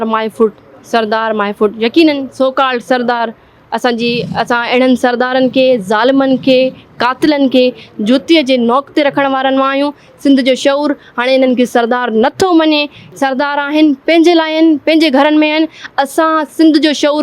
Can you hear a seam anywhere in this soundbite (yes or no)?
no